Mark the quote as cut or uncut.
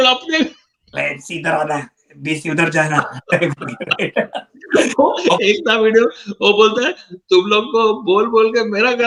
uncut